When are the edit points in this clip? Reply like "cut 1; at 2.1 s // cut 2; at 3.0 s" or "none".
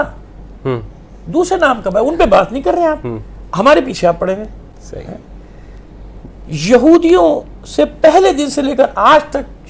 none